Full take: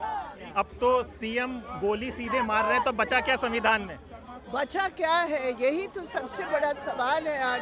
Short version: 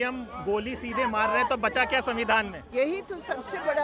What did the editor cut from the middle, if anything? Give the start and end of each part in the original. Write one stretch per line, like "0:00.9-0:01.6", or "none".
0:04.1-0:05.6